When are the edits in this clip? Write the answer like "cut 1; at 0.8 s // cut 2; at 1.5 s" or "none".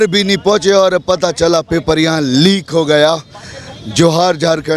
none